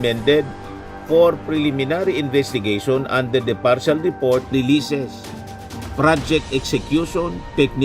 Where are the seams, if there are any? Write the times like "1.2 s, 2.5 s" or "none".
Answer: 4.5 s